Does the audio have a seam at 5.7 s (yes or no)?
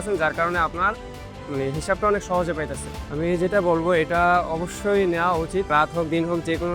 yes